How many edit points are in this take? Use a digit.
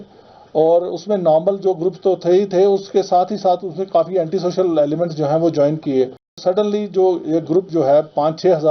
1